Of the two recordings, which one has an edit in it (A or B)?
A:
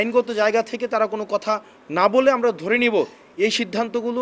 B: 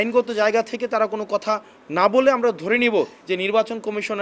B